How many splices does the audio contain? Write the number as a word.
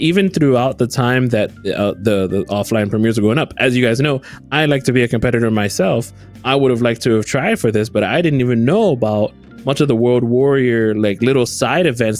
zero